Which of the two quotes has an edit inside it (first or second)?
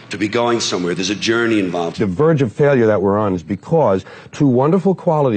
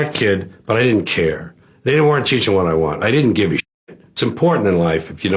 first